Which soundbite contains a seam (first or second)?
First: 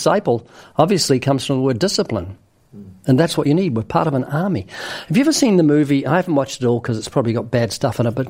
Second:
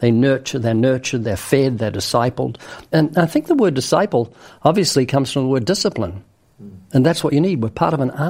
second